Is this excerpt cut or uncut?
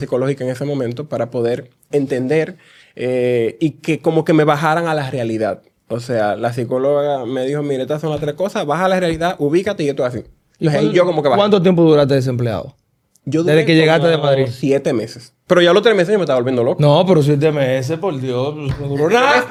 uncut